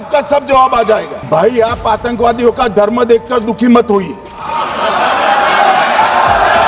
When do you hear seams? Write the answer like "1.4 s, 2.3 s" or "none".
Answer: 1.1 s

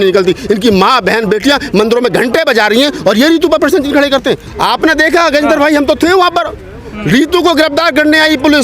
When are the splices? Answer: 4.5 s

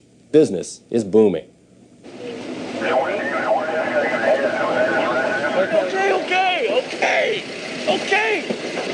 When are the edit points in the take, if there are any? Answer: none

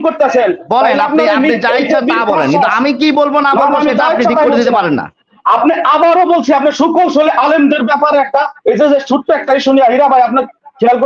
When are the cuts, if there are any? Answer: none

